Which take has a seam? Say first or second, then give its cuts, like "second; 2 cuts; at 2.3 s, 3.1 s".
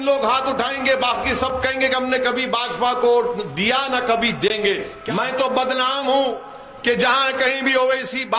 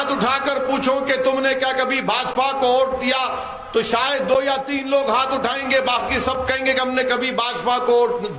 first; 1 cut; at 4.9 s